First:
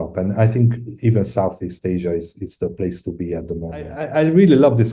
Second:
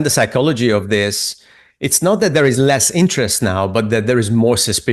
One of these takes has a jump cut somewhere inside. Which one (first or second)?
first